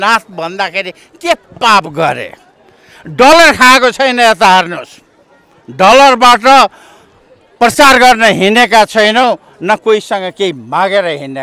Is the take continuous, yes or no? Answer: yes